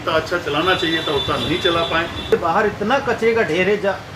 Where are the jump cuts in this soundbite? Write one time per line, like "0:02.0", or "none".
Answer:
0:02.3